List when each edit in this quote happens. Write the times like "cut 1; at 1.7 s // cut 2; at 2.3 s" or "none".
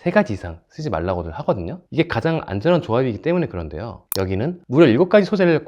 cut 1; at 4.6 s